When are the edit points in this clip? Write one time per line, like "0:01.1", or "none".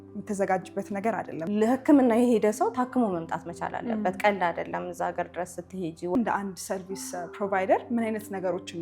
0:01.5
0:06.2